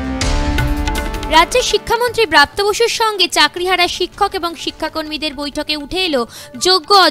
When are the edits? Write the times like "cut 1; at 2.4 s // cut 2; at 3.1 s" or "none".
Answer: cut 1; at 1.2 s